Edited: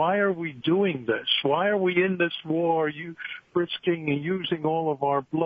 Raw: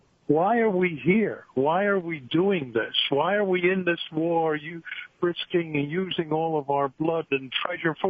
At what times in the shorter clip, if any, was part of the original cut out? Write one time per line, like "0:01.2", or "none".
none